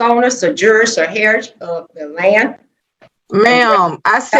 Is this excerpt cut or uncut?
uncut